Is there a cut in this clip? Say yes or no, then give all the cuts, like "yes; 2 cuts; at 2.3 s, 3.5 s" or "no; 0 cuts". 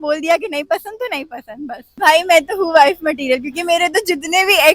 yes; 1 cut; at 1.8 s